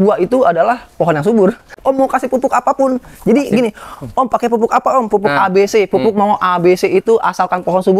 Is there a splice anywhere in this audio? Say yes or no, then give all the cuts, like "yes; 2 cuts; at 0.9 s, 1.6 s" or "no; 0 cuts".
yes; 1 cut; at 1.7 s